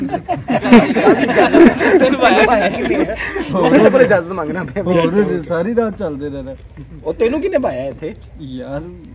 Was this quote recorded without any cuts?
yes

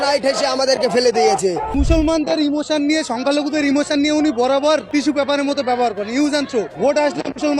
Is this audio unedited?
no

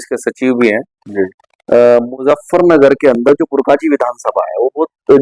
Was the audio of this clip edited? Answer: no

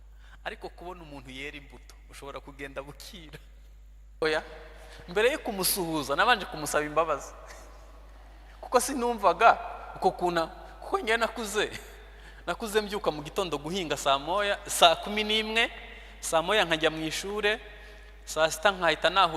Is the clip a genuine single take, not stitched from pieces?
no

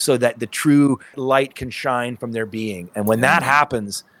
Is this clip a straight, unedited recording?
no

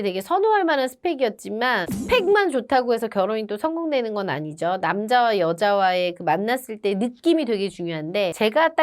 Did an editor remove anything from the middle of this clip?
no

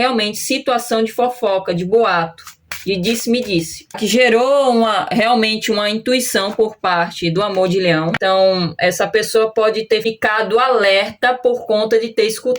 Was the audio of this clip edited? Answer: yes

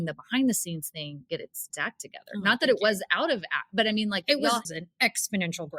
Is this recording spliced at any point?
yes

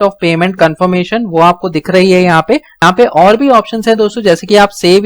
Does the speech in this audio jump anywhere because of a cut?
yes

